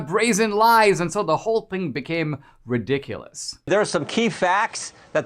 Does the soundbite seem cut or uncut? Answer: cut